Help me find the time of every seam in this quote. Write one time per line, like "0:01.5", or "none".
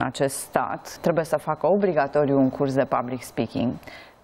0:00.9